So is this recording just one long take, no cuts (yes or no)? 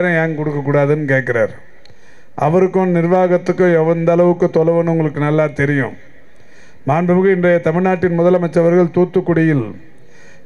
yes